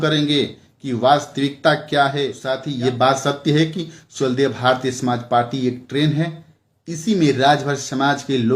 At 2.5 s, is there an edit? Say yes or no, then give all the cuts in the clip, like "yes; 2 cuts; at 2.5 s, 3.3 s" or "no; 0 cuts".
yes; 1 cut; at 2.5 s